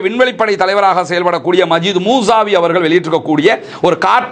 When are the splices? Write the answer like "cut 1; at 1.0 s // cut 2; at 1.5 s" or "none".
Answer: none